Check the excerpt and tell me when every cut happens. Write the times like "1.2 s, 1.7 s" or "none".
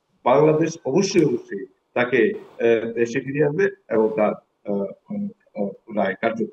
none